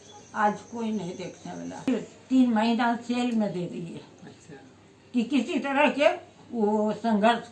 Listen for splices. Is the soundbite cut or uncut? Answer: cut